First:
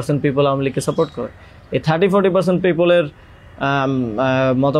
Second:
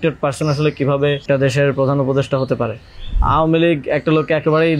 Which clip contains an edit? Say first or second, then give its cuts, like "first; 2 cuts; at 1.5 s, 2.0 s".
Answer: second; 2 cuts; at 1.2 s, 3.2 s